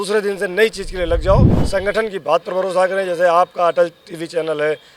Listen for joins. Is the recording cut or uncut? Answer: cut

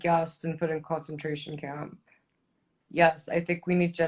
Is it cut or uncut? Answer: cut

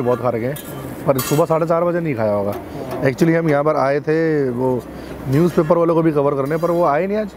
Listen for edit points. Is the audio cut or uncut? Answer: uncut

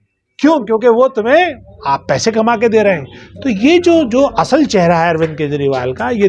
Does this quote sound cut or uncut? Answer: uncut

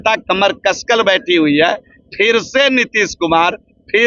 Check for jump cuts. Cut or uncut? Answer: uncut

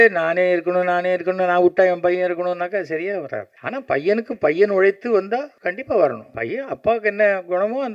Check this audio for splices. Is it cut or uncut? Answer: cut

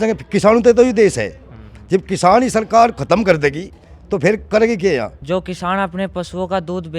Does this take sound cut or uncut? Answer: cut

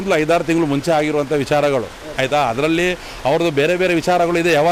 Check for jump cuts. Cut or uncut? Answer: uncut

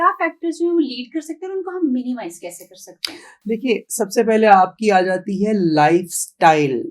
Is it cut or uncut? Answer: uncut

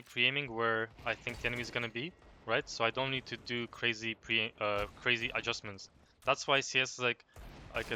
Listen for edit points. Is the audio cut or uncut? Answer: uncut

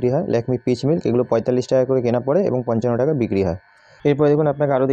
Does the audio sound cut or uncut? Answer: uncut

